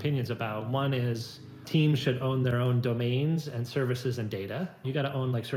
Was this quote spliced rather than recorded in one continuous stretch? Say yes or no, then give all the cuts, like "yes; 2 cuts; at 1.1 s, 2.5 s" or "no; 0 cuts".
yes; 2 cuts; at 1.6 s, 4.8 s